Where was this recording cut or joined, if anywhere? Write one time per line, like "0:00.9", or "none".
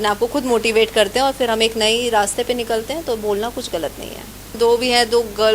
0:04.6